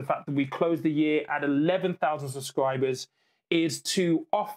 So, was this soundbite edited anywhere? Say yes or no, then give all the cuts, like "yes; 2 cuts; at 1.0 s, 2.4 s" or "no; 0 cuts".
no; 0 cuts